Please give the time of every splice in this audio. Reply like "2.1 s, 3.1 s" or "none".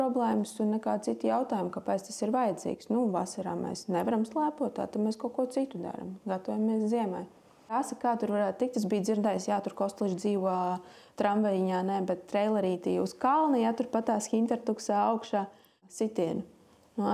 7.7 s, 15.8 s